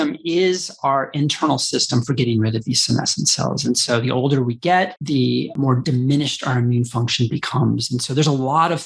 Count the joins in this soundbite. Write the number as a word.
zero